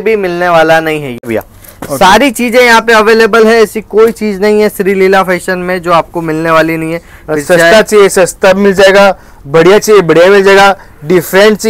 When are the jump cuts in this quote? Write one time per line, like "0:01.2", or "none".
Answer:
0:01.2